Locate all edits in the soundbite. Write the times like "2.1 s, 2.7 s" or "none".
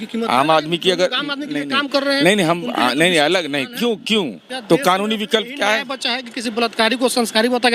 4.5 s